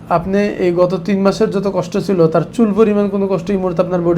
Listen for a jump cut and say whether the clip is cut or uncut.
uncut